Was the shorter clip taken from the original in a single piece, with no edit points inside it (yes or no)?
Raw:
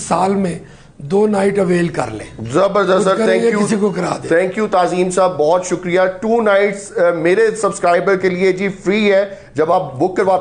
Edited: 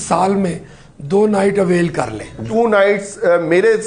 no